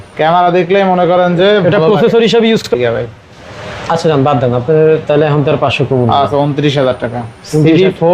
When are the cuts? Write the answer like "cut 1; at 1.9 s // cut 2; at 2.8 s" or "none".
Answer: cut 1; at 2.7 s